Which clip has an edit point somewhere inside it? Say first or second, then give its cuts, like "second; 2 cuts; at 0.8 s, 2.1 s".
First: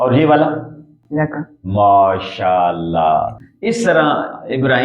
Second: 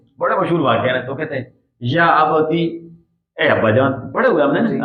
first; 1 cut; at 3.4 s